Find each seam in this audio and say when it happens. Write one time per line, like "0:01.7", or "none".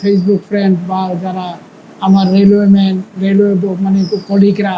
none